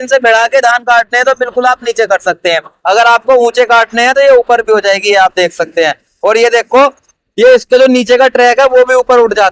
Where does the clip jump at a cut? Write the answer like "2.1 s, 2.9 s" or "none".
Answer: none